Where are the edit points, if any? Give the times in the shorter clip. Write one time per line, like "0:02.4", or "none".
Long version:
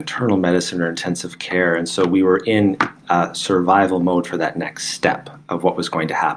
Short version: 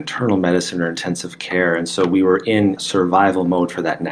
0:02.8